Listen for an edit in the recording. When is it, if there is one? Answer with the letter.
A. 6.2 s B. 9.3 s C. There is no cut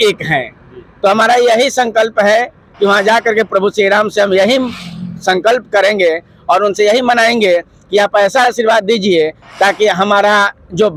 C